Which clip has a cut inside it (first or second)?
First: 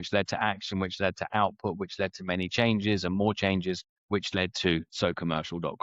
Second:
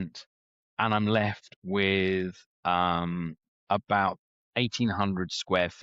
first